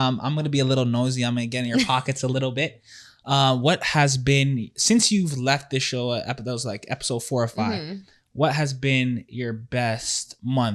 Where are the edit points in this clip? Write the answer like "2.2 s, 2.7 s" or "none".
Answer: none